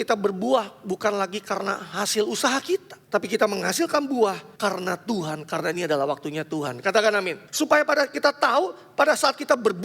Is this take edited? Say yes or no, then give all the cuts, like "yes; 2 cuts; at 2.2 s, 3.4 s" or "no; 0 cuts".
yes; 3 cuts; at 3.0 s, 4.5 s, 7.4 s